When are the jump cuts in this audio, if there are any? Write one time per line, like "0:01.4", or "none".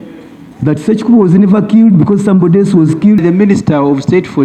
0:03.2